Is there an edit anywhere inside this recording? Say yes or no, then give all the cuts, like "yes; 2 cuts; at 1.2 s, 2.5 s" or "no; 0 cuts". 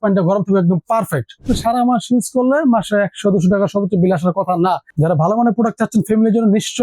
yes; 2 cuts; at 1.4 s, 4.9 s